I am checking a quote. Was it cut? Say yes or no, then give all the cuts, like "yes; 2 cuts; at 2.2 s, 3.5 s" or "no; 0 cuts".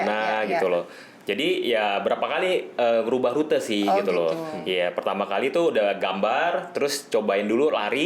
no; 0 cuts